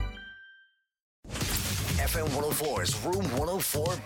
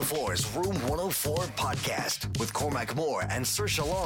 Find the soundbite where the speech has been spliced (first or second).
first